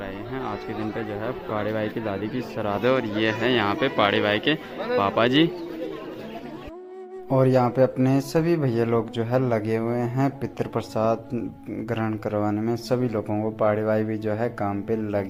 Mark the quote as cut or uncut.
uncut